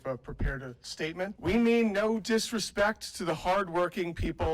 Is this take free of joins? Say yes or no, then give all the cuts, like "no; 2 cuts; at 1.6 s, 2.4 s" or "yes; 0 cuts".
no; 1 cut; at 1.4 s